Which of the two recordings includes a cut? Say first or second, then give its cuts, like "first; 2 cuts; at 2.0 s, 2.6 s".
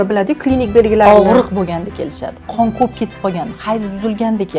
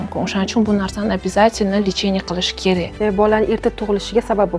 second; 1 cut; at 2.9 s